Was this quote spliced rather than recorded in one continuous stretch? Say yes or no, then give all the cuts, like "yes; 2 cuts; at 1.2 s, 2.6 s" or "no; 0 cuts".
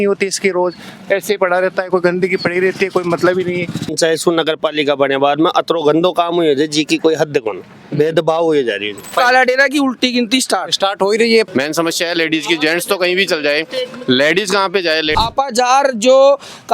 yes; 4 cuts; at 3.9 s, 9.1 s, 11.5 s, 15.1 s